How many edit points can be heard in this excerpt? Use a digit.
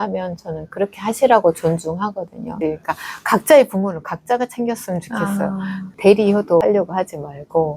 1